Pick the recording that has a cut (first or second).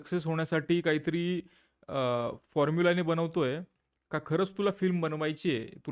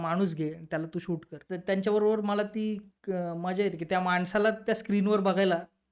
second